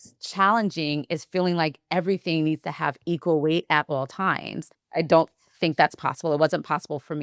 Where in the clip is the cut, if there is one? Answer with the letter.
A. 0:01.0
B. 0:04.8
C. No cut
B